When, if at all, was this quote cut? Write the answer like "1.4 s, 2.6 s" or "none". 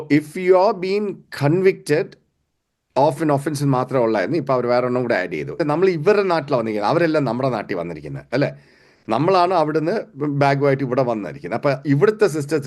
5.5 s